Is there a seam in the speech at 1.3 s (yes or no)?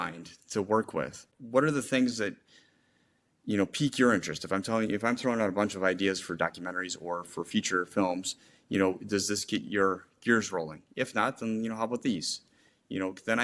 yes